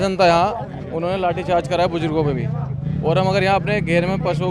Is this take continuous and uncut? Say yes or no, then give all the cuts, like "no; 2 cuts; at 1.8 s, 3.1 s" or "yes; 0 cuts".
yes; 0 cuts